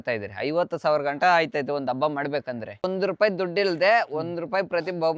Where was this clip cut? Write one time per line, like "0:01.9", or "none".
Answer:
0:02.8